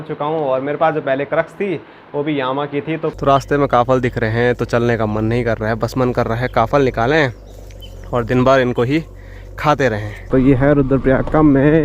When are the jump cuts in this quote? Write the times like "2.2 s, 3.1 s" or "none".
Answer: 3.1 s, 10.3 s